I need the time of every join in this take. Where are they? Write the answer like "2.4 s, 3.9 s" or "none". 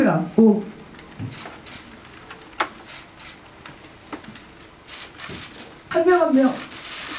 5.9 s